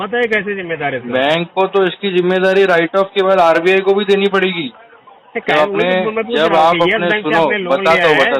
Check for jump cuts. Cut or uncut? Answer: uncut